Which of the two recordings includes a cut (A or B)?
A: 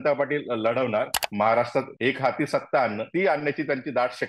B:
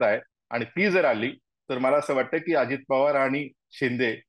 A